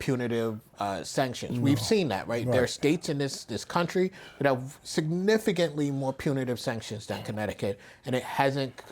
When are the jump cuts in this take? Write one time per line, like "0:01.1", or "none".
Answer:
none